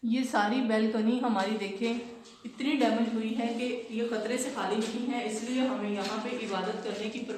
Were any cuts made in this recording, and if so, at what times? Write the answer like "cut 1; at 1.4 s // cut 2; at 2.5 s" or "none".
none